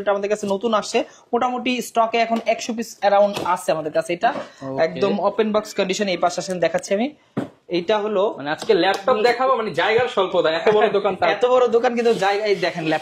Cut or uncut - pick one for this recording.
uncut